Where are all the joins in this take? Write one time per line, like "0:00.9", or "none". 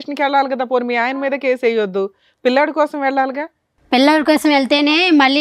none

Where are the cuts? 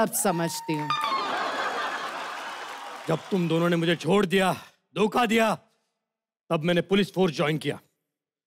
0:02.9

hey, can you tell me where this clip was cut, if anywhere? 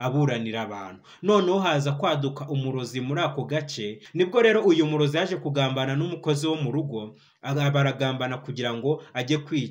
0:04.0

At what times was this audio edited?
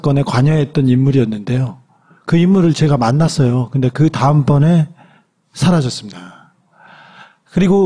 0:01.3

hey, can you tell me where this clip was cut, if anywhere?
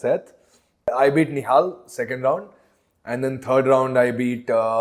0:00.9

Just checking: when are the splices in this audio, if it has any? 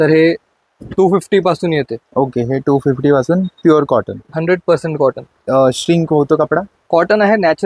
none

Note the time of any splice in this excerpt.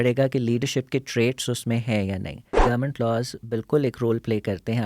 0:02.6

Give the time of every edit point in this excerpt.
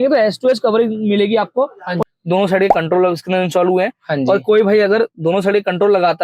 0:02.0

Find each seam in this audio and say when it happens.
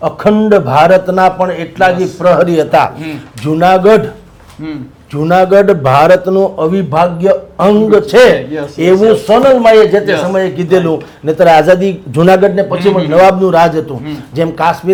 none

